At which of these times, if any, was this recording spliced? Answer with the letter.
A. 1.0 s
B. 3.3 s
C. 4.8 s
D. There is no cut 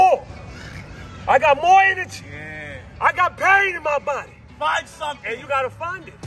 D